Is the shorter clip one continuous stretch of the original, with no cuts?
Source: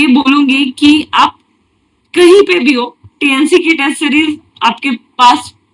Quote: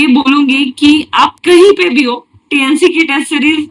no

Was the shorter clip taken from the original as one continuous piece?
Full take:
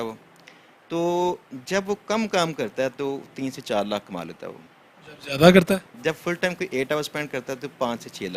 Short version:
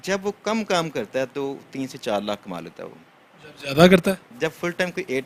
yes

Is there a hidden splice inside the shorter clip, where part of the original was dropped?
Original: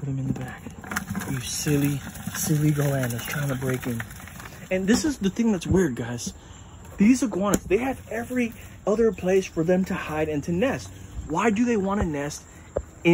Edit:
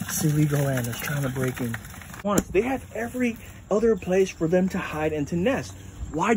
yes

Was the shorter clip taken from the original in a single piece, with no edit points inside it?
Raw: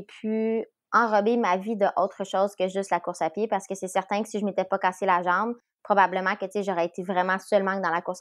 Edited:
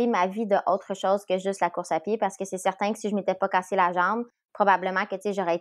yes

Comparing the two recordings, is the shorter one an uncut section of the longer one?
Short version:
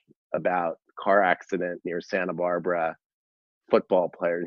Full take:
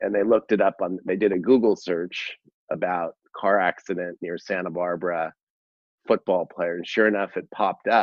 yes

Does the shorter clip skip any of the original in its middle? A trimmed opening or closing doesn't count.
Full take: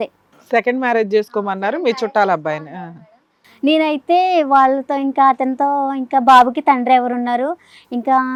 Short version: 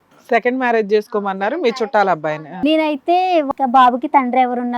yes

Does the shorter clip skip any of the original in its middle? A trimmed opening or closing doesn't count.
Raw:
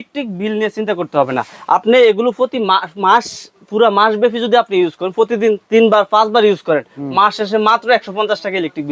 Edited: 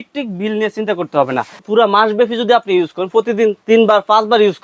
yes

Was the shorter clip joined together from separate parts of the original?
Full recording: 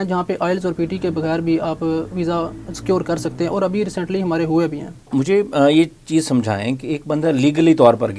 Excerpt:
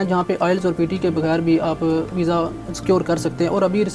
no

